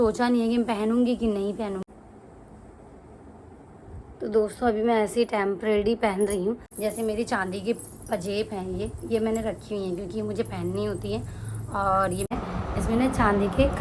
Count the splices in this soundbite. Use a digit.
3